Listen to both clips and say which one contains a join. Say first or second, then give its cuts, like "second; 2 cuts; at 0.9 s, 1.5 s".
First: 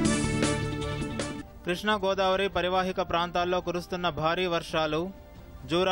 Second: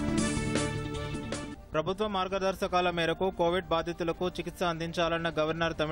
first; 1 cut; at 1.4 s